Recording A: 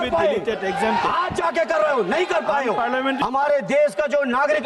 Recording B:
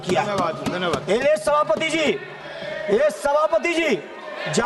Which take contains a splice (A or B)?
A